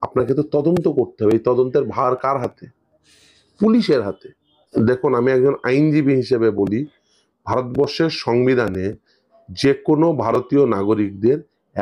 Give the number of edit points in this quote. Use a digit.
1